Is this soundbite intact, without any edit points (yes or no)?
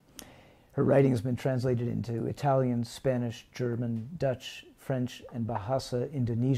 yes